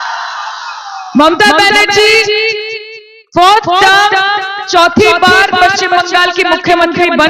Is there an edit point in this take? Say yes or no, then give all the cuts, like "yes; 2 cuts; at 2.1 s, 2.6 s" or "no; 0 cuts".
no; 0 cuts